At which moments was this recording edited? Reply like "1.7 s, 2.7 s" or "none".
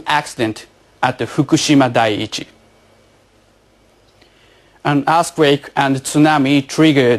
1.3 s